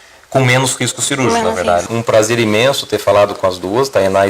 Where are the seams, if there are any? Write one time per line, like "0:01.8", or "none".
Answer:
0:01.9